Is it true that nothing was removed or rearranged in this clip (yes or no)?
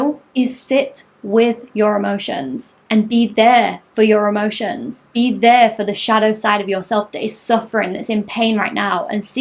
yes